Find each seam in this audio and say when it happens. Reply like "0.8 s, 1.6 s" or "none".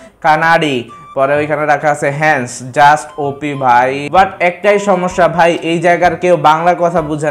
4.0 s